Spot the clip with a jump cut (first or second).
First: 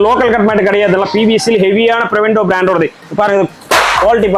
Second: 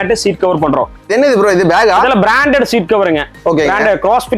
second